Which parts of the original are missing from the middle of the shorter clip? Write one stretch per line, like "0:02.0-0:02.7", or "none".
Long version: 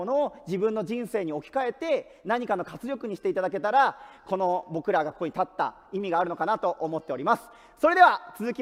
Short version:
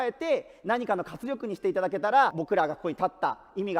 0:04.0-0:04.7